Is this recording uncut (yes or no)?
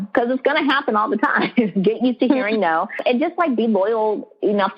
no